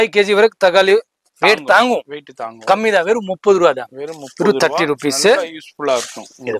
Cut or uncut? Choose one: uncut